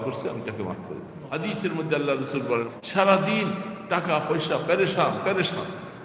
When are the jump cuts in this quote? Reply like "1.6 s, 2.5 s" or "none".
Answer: 1.2 s, 2.7 s